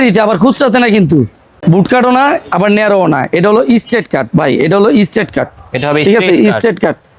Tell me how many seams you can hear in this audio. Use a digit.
1